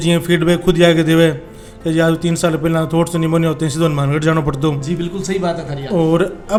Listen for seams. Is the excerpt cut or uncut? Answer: uncut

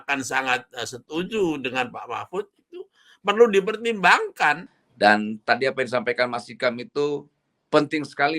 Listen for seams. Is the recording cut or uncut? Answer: cut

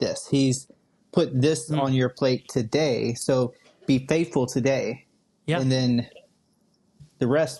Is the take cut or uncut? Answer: uncut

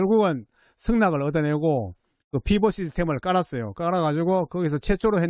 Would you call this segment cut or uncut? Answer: uncut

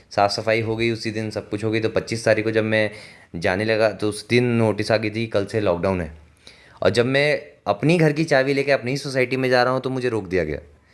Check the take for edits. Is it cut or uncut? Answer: uncut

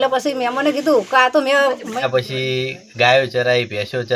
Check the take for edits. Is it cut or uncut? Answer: cut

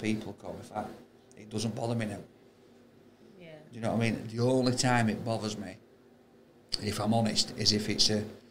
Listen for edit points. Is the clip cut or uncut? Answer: uncut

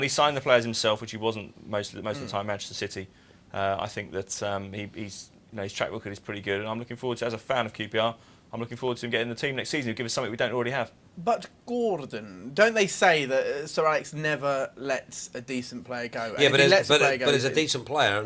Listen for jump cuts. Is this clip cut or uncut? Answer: cut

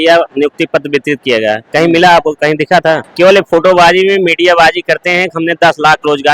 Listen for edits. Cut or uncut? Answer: cut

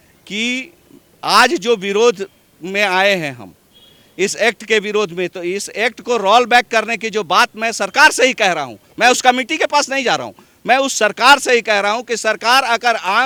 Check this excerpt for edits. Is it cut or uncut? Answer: uncut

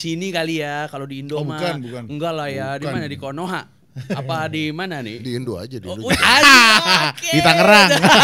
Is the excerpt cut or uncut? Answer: uncut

